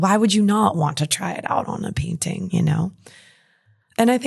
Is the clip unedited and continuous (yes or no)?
no